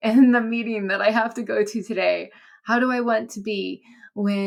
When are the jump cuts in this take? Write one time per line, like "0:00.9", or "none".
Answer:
none

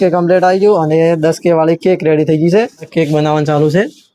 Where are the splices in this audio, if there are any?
0:02.9

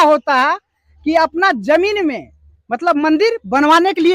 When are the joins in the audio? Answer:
none

